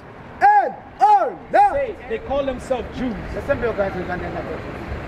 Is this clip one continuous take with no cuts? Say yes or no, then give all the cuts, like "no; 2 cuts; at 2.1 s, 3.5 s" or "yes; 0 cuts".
no; 1 cut; at 1.7 s